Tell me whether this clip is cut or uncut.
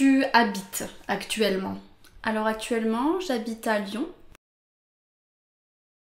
uncut